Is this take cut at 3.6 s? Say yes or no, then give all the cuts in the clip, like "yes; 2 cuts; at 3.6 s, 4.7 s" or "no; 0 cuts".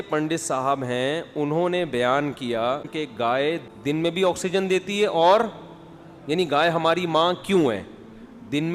yes; 2 cuts; at 2.9 s, 3.6 s